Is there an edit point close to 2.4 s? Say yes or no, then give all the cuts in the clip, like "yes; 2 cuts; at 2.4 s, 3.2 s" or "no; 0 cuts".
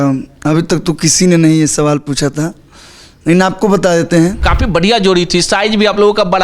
no; 1 cut; at 4.4 s